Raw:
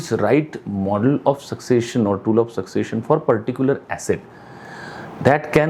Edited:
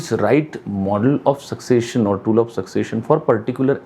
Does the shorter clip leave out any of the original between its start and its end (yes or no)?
no